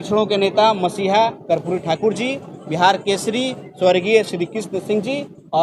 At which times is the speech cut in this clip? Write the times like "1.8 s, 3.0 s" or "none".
none